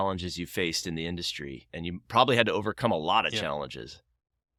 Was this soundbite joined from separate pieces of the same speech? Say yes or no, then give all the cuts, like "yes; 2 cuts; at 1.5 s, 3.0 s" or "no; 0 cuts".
no; 0 cuts